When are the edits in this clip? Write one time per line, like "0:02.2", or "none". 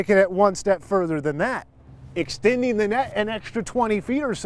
none